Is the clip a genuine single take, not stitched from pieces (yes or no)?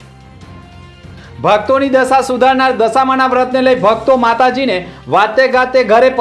no